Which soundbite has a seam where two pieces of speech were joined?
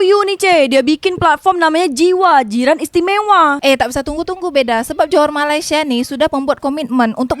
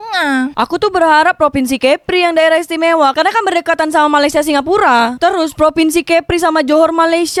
first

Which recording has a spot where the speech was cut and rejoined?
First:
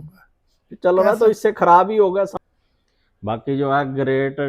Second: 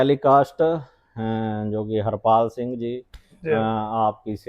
first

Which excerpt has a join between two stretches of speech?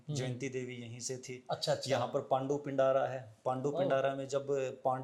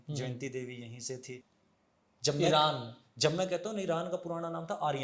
second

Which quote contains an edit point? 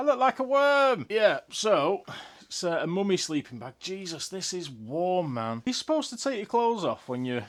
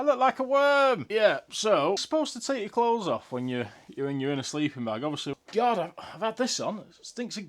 second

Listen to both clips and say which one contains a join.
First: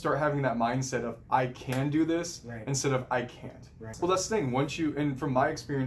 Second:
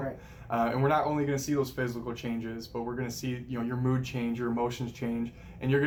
first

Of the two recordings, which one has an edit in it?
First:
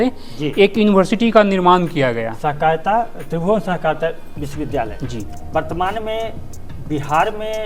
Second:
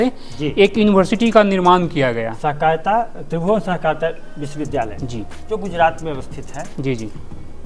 first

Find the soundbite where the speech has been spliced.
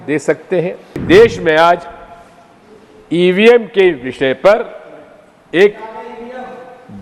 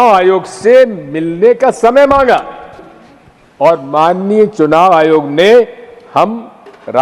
first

